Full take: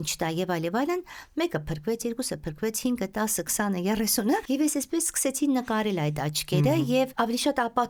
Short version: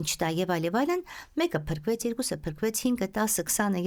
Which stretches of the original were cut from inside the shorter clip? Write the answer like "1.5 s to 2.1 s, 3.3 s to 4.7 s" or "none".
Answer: none